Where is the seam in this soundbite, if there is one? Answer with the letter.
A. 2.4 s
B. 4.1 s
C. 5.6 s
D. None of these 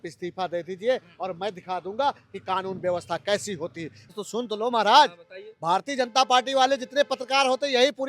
B